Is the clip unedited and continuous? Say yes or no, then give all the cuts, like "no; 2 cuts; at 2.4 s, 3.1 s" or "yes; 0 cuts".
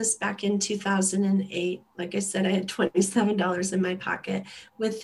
yes; 0 cuts